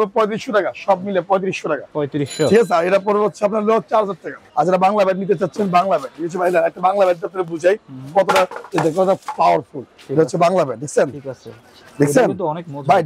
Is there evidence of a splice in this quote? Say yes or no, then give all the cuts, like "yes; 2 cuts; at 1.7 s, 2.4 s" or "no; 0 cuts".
yes; 2 cuts; at 4.4 s, 8.6 s